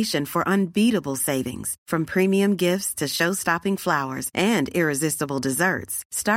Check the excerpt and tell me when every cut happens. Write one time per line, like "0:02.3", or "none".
none